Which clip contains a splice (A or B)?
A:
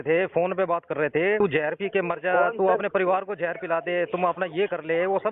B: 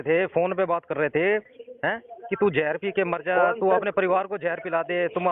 A